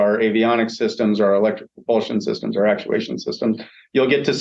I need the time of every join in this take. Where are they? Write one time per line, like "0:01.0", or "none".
none